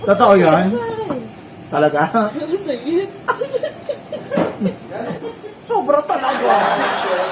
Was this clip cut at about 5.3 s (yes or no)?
yes